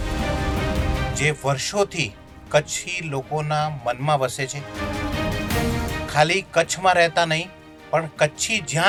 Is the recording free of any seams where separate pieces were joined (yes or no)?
yes